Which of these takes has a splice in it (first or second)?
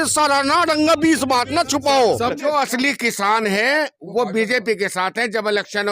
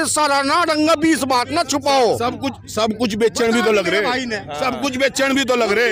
first